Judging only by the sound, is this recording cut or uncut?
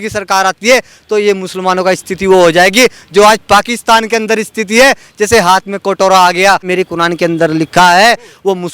cut